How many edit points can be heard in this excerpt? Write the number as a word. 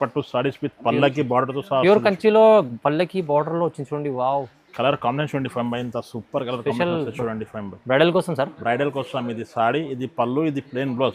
zero